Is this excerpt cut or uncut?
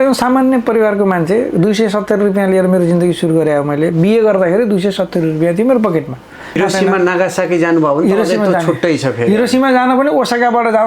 cut